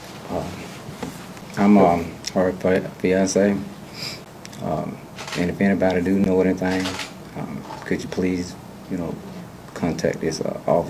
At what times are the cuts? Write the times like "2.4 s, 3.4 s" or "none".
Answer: none